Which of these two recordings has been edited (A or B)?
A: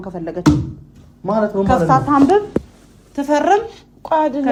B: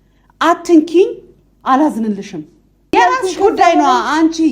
B